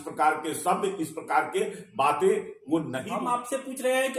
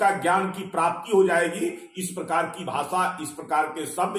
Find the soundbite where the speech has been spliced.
first; 1 cut; at 3.0 s

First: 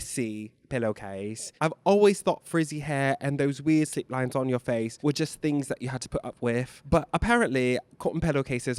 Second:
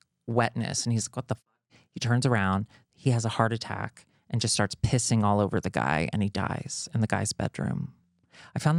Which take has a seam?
first; 2 cuts; at 1.4 s, 4.9 s

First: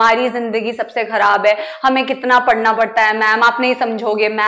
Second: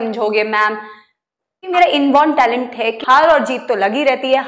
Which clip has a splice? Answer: second; 2 cuts; at 1.7 s, 3.0 s

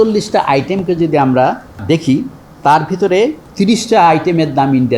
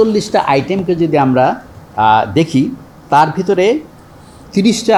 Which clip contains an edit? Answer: first; 2 cuts; at 1.8 s, 3.4 s

